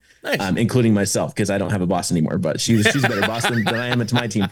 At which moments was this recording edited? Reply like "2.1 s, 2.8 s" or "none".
none